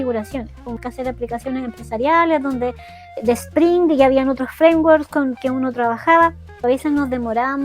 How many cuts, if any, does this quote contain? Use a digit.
3